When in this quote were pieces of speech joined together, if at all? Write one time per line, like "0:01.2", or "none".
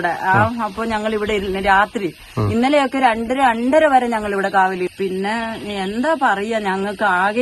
0:04.9